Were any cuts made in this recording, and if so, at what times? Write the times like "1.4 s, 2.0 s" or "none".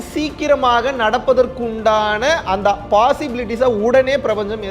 none